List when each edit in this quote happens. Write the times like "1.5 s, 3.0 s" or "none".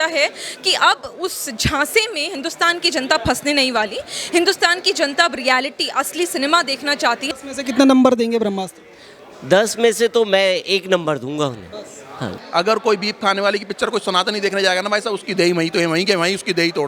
7.3 s, 12.4 s